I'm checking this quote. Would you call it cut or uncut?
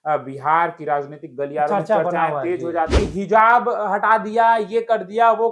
cut